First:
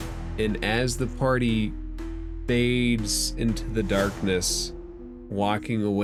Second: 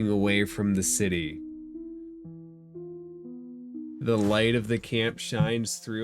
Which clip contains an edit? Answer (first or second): second